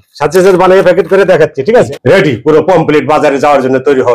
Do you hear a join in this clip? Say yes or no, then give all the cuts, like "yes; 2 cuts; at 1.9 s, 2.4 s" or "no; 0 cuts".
yes; 1 cut; at 1.9 s